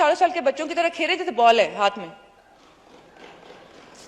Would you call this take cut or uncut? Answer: uncut